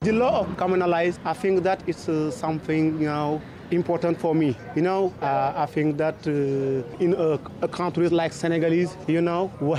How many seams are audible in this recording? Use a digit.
0